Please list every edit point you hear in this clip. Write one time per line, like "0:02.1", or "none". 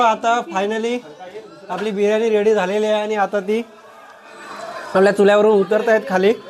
none